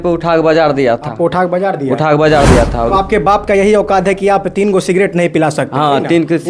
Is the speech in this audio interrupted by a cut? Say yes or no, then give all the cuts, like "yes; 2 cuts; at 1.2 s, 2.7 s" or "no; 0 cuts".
yes; 1 cut; at 2.9 s